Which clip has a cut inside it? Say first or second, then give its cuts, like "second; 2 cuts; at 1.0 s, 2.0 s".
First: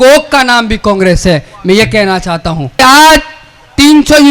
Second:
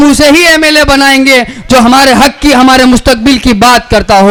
first; 1 cut; at 2.8 s